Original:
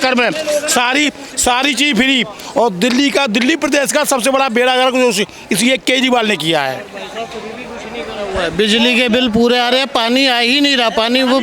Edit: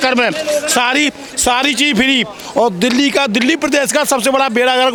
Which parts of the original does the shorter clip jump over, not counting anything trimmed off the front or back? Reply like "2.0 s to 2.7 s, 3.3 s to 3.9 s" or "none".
none